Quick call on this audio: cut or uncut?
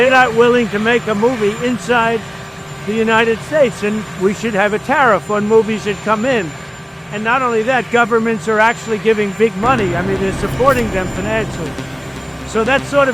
uncut